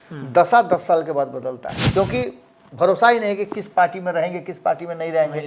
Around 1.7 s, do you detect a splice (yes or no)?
yes